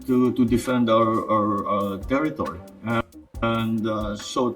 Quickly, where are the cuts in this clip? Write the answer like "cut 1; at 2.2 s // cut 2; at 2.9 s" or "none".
cut 1; at 2.9 s